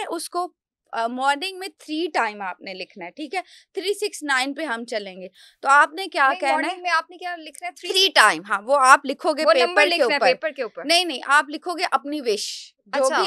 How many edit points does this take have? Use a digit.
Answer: 0